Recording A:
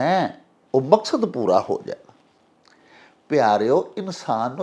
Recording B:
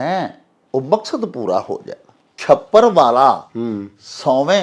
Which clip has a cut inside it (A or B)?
B